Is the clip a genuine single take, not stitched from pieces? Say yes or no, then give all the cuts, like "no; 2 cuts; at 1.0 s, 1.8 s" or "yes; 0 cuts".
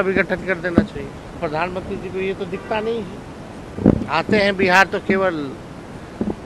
no; 2 cuts; at 1.4 s, 3.6 s